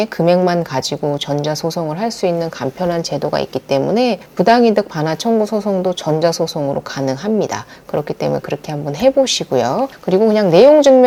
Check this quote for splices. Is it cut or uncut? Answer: uncut